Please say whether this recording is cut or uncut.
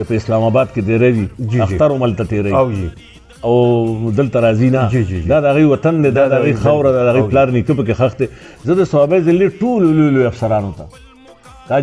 uncut